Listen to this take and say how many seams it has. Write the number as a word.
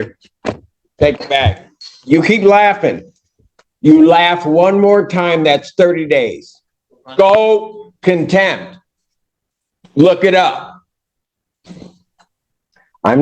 one